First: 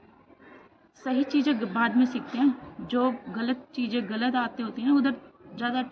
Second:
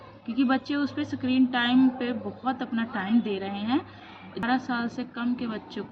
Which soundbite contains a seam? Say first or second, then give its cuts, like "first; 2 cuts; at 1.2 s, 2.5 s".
second; 1 cut; at 4.4 s